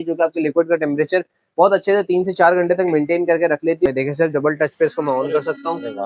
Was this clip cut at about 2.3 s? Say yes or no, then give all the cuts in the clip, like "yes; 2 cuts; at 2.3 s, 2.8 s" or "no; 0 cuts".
no; 1 cut; at 3.9 s